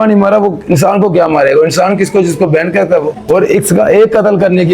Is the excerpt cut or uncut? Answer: cut